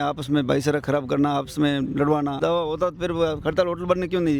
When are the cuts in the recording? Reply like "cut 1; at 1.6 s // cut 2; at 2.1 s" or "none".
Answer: cut 1; at 2.4 s